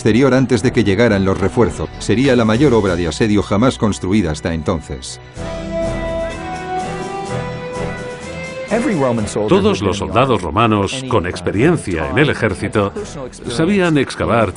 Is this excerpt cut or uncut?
uncut